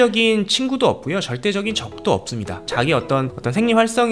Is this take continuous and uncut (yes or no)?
no